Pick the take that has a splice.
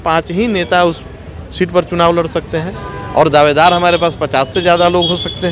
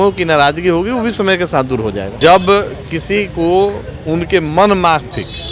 second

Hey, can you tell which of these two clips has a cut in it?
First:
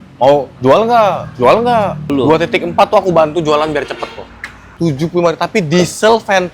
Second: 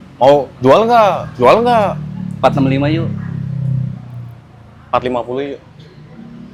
first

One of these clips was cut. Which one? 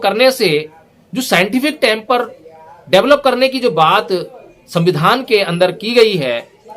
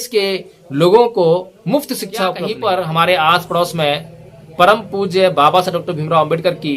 second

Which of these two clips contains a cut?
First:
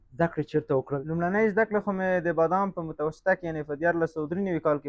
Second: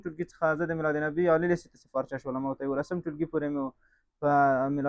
first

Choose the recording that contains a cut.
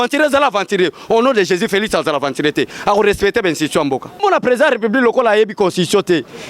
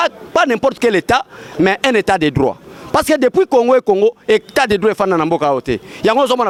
first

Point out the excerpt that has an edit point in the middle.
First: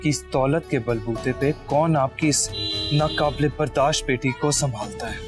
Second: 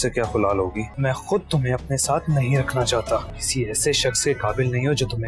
second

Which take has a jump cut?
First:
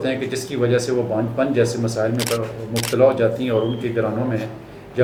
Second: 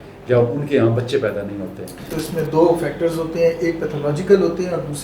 second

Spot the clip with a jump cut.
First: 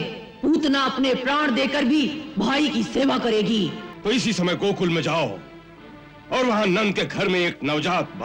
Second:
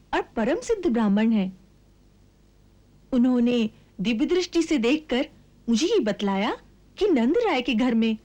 first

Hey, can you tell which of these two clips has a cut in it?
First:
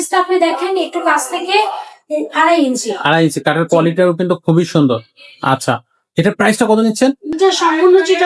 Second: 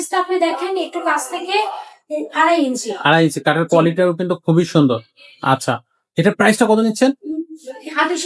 first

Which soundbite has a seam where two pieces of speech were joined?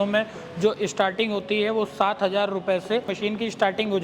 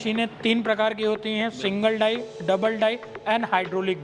first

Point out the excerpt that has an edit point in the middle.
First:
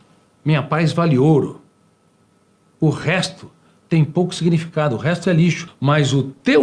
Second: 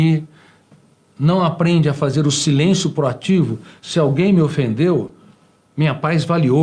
first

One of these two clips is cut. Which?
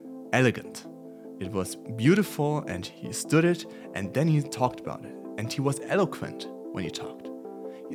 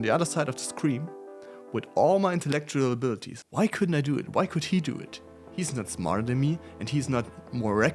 second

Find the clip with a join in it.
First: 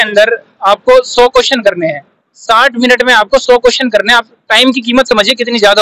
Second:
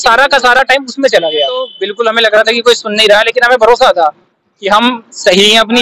second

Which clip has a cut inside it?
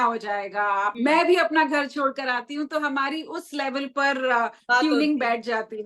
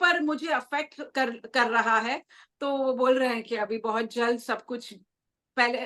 first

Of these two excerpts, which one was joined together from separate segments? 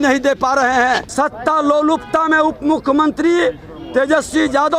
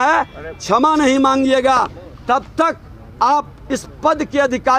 first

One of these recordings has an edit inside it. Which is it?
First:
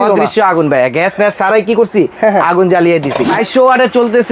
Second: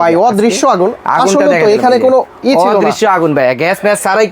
first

